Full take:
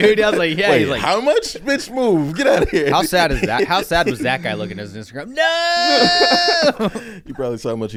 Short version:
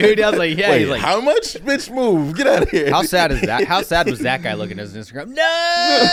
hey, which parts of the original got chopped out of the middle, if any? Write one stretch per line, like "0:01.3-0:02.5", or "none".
none

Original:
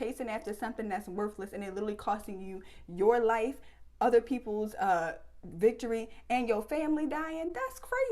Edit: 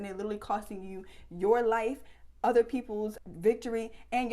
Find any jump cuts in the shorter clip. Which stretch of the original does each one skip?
0:04.7-0:05.3

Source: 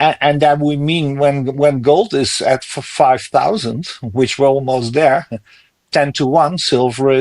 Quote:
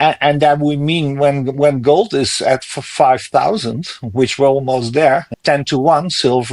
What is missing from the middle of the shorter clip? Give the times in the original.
0:05.3-0:05.8

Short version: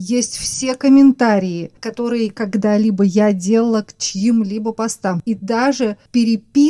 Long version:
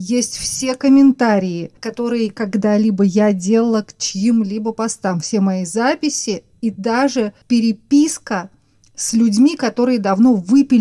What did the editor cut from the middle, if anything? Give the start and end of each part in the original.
0:05.2-0:06.6

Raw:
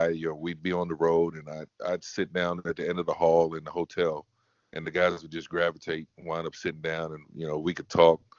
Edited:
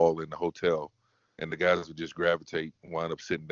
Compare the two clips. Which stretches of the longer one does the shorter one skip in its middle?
none

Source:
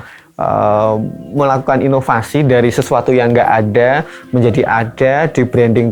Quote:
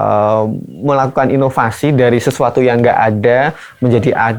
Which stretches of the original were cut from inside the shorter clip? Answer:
none

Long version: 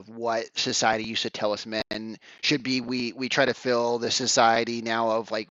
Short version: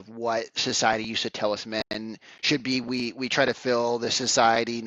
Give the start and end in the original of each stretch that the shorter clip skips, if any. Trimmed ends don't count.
none

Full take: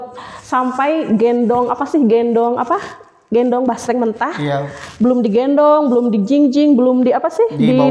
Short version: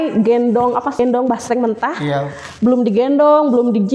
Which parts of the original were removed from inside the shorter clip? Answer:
0:01.9-0:03.4

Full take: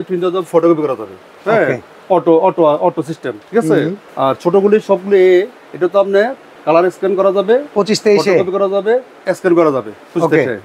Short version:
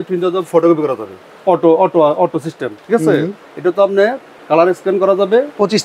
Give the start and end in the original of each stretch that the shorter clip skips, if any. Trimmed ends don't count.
0:01.3-0:01.9
0:04.1-0:05.6

